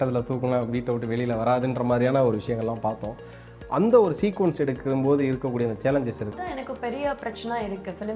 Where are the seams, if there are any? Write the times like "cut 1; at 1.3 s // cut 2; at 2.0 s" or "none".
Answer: cut 1; at 6.4 s